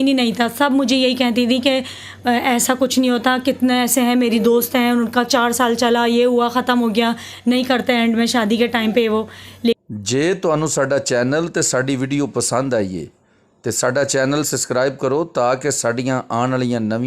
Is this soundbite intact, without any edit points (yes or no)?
no